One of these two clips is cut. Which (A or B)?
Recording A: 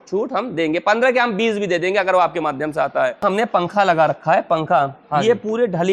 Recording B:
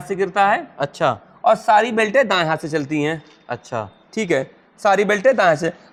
A